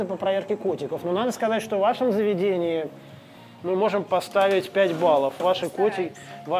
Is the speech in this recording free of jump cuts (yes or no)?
yes